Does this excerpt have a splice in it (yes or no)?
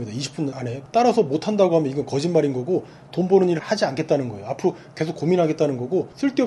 no